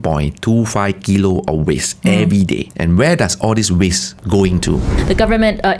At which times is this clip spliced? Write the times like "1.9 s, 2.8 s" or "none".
2.7 s, 4.1 s, 4.9 s